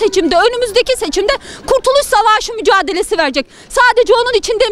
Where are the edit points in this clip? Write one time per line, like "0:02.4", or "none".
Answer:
none